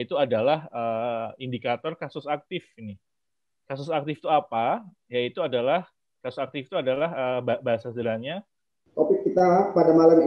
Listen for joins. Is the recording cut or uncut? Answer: cut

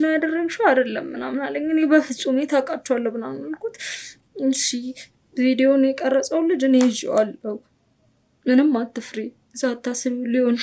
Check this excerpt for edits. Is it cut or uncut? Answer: uncut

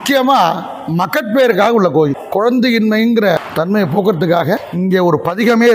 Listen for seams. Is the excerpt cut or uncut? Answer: cut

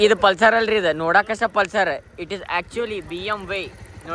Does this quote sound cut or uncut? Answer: uncut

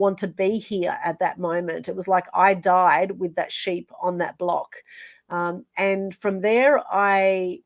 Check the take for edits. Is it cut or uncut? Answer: uncut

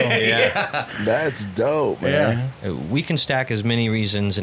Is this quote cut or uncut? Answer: cut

